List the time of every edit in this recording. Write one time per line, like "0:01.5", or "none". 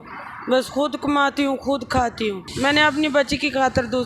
0:02.5